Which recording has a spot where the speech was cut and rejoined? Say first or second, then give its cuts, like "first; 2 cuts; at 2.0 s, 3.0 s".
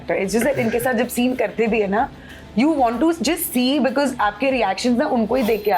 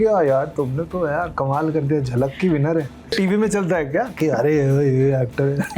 second; 1 cut; at 3.1 s